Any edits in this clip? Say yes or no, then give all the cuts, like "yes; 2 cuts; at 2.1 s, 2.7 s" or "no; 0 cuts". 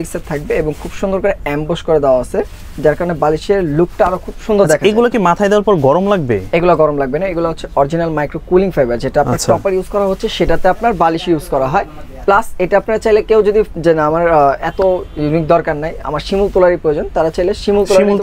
no; 0 cuts